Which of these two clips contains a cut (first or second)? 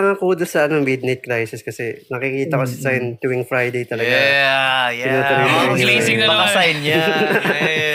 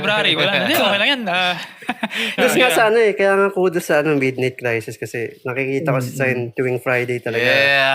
second